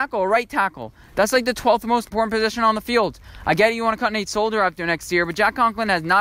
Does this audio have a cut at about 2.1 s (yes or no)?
yes